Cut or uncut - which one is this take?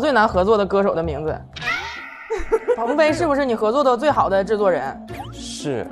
cut